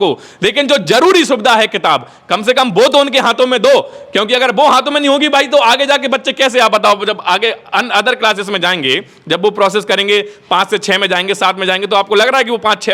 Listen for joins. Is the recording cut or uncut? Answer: uncut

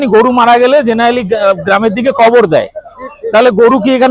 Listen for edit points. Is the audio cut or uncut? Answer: uncut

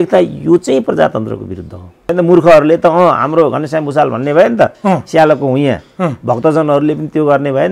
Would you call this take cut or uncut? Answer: cut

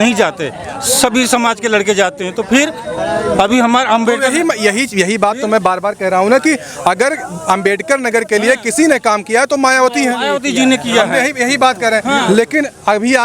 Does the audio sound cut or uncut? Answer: uncut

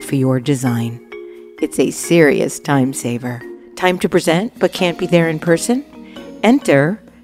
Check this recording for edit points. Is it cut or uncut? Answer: uncut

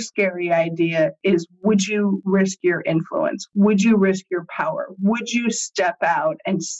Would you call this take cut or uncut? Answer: uncut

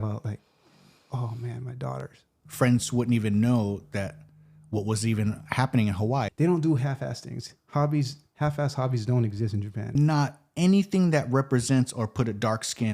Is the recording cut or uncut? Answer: cut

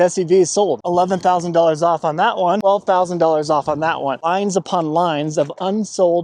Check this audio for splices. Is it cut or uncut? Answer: cut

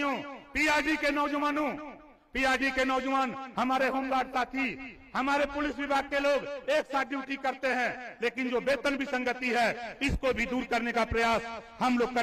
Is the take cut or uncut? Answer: uncut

